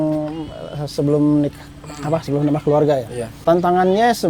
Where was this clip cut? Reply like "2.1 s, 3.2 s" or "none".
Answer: 3.2 s